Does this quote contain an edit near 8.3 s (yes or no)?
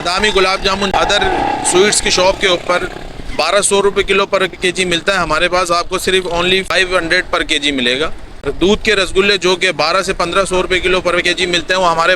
yes